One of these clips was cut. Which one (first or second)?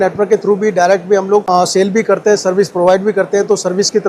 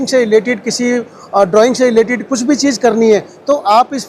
first